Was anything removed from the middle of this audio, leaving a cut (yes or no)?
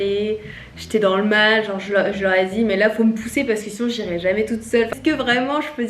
no